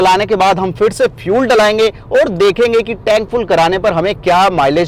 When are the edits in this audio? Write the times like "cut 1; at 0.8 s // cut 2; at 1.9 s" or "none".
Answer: none